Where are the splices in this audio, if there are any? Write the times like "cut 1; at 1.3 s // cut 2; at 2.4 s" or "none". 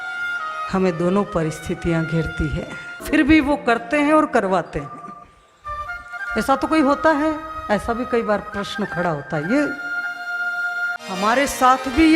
cut 1; at 3.0 s // cut 2; at 11.1 s